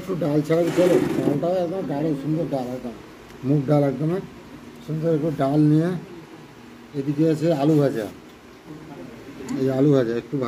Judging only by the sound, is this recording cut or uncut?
uncut